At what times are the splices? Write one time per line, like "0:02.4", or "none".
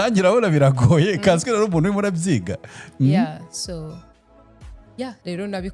none